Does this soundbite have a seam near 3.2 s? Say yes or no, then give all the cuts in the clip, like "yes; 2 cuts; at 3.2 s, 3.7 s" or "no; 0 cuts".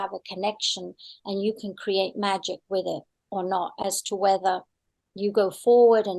no; 0 cuts